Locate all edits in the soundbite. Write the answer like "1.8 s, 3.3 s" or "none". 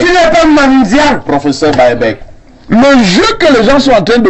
2.2 s